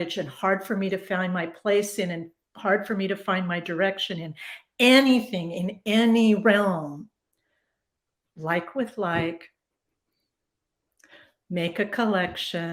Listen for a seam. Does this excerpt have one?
no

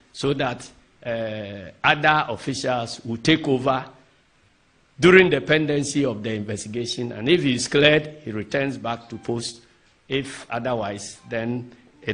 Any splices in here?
yes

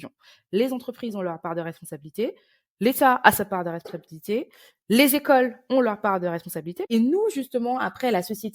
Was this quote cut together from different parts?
yes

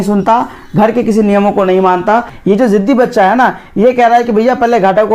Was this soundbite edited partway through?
yes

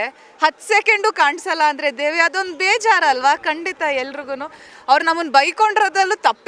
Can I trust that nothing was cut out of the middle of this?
no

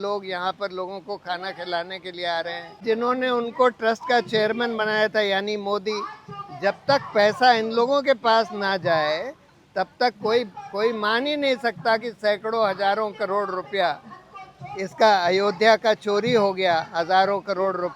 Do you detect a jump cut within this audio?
yes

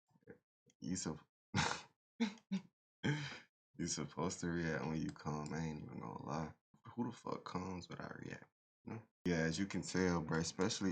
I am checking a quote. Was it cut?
yes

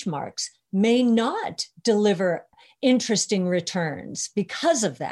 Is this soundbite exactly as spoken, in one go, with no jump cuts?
no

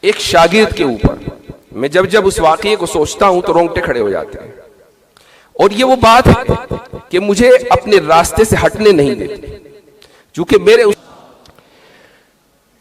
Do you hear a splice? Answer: yes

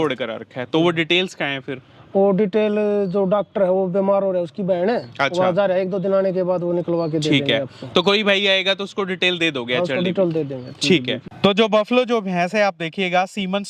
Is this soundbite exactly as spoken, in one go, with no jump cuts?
no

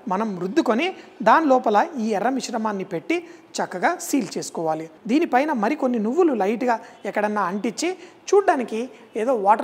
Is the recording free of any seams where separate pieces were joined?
no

